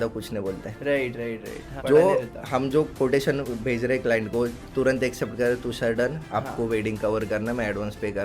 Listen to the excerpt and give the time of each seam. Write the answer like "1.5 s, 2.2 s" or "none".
1.8 s